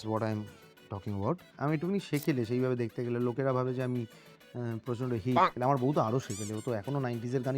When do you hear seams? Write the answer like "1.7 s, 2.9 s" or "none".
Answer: 1.5 s